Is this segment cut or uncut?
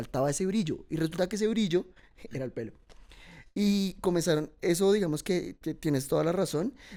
uncut